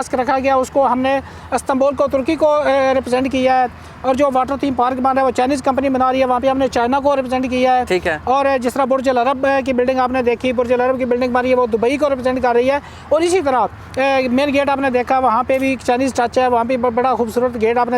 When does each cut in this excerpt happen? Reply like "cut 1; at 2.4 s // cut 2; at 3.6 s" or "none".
none